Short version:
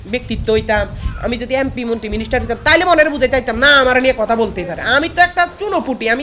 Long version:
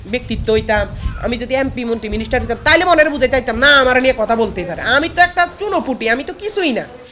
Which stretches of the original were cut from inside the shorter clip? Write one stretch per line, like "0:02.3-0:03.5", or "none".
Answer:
none